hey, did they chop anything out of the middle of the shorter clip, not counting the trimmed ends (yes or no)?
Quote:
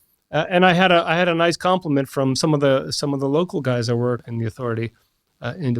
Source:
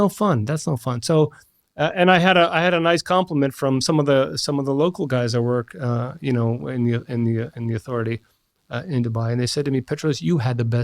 yes